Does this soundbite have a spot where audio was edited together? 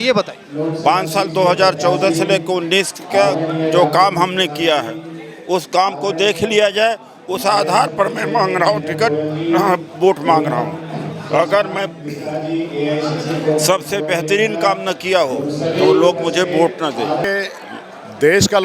yes; 1 cut; at 17.2 s

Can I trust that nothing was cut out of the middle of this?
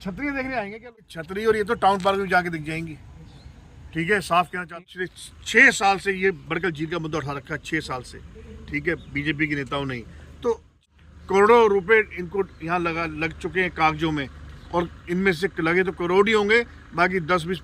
no; 3 cuts; at 1.0 s, 4.8 s, 10.8 s

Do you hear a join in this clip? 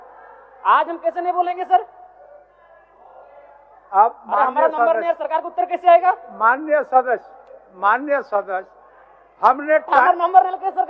no; 0 cuts

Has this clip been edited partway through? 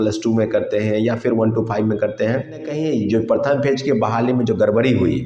yes; 1 cut; at 2.7 s

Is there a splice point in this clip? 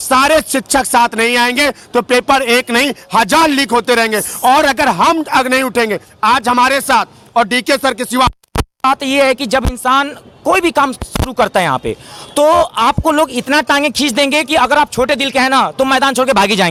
no; 0 cuts

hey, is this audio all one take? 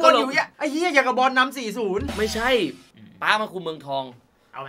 no; 1 cut; at 2.9 s

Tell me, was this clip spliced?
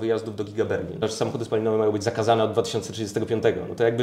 yes; 1 cut; at 1.0 s

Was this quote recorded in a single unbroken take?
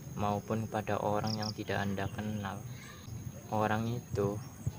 yes; 0 cuts

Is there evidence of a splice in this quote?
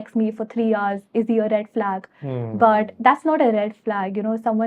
no; 0 cuts

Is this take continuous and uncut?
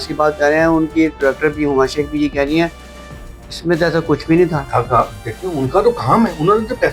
yes; 0 cuts

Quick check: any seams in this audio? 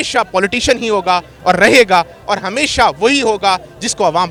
no; 0 cuts

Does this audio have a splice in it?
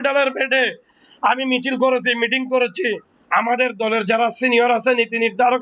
yes; 1 cut; at 3.1 s

